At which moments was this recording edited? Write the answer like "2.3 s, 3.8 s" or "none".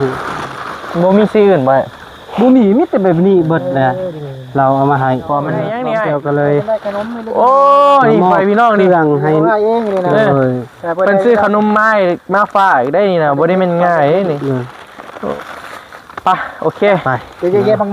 5.7 s, 15.3 s